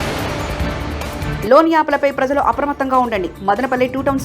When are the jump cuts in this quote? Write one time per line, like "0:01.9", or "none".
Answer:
0:01.2